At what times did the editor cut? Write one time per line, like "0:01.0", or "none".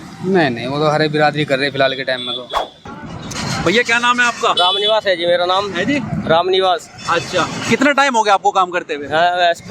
0:02.8